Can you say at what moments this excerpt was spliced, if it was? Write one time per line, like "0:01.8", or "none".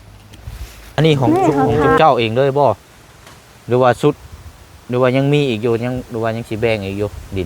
0:02.0